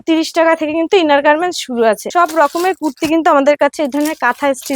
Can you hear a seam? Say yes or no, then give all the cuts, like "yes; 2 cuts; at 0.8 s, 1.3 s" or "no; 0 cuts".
yes; 1 cut; at 2.0 s